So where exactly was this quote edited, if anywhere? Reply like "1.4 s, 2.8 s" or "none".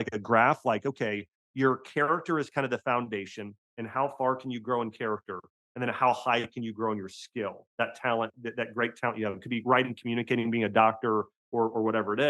none